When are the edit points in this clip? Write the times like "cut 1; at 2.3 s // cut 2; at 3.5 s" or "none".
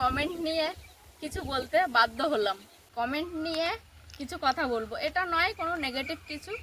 none